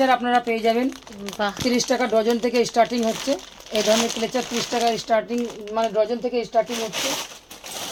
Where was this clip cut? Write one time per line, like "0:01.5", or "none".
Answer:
none